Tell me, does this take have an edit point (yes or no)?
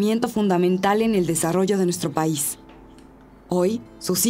no